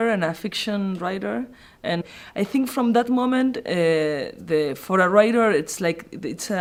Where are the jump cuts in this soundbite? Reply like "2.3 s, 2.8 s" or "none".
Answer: none